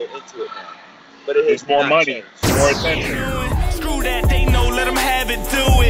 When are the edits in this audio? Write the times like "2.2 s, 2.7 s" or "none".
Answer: 3.1 s